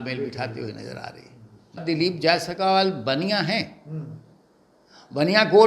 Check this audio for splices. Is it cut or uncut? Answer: cut